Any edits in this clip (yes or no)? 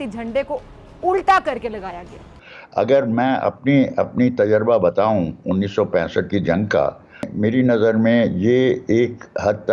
yes